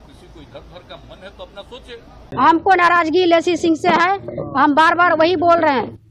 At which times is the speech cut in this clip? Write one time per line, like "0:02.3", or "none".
0:02.3

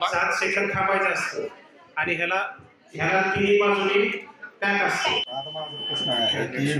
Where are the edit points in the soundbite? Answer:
0:05.5

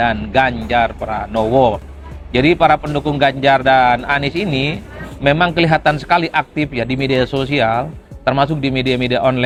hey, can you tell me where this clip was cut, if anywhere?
none

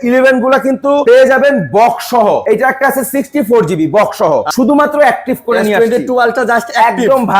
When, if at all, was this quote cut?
0:01.0
0:02.4
0:04.5

